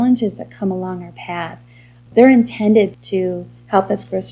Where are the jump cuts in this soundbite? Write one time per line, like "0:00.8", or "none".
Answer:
0:02.1
0:03.0